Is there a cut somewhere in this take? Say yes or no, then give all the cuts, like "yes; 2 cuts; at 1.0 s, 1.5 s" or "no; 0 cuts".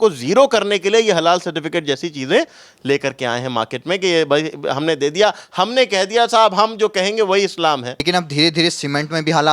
yes; 1 cut; at 8.0 s